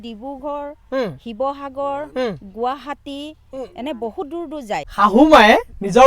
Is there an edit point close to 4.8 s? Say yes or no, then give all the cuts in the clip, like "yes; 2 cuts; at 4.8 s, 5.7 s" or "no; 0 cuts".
yes; 1 cut; at 4.8 s